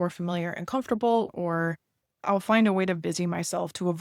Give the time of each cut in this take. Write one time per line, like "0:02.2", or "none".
0:01.3